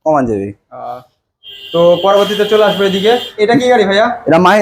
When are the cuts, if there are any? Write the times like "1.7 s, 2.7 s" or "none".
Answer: none